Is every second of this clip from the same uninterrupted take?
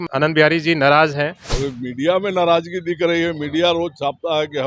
no; 1 cut; at 1.4 s

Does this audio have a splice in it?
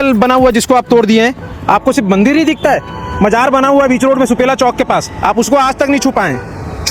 no; 0 cuts

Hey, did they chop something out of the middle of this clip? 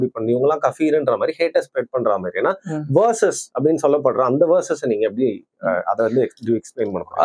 no; 0 cuts

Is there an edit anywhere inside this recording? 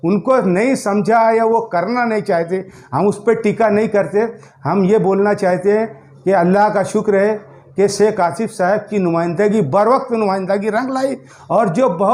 no; 0 cuts

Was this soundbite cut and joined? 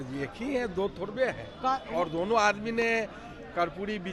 no; 0 cuts

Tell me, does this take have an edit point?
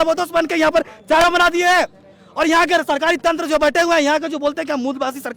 yes; 1 cut; at 1.2 s

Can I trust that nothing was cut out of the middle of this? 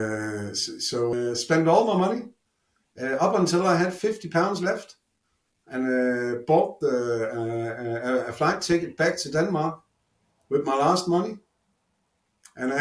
no; 1 cut; at 1.1 s

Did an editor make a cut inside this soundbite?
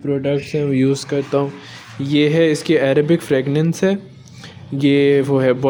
no; 0 cuts

